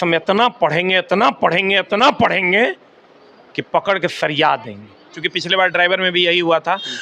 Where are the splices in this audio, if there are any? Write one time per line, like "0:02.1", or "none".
0:05.2